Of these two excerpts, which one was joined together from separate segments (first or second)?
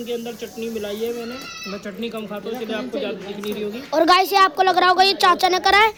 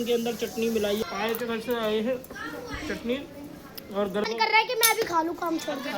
second